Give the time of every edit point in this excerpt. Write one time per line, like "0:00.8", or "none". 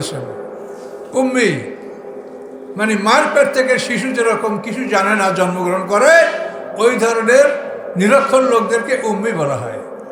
none

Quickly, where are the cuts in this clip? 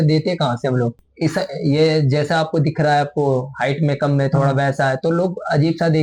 0:00.9

